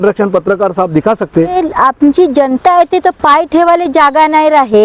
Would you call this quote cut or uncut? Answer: cut